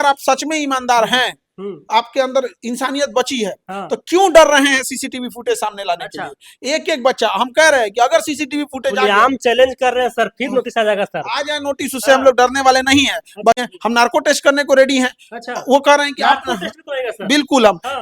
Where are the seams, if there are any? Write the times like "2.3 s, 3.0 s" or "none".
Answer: 13.6 s